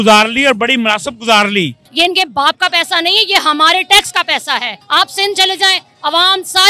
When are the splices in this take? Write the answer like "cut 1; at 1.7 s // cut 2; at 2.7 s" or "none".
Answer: cut 1; at 1.8 s // cut 2; at 4.8 s